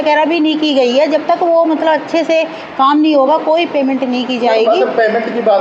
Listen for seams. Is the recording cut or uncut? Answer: uncut